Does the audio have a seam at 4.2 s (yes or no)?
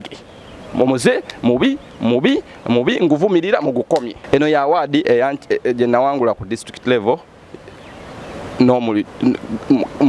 yes